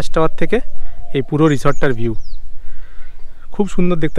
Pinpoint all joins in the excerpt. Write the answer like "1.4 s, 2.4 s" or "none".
none